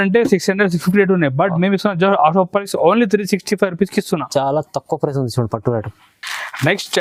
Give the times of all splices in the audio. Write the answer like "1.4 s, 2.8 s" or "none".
none